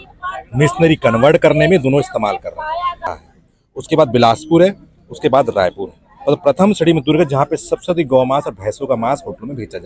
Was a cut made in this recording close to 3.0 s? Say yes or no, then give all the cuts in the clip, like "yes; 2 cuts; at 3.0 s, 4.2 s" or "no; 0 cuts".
yes; 1 cut; at 3.0 s